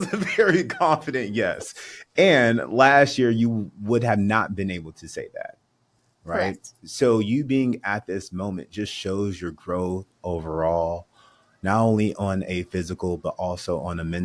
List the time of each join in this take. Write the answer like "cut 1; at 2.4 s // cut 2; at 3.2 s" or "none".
none